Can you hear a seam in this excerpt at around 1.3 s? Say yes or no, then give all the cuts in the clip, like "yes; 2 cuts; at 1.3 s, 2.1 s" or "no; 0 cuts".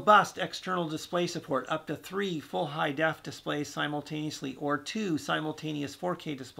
no; 0 cuts